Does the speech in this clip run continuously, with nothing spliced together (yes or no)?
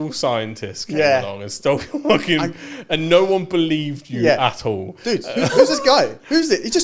yes